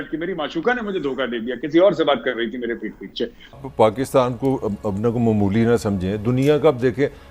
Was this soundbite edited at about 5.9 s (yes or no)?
no